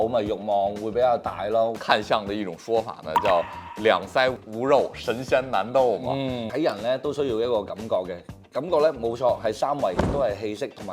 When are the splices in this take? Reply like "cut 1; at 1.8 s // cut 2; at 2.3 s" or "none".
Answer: cut 1; at 1.7 s // cut 2; at 4.4 s // cut 3; at 6.5 s